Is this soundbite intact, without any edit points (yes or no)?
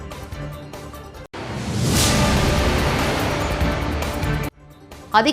no